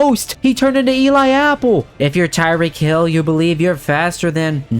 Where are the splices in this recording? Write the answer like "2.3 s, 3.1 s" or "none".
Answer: 1.9 s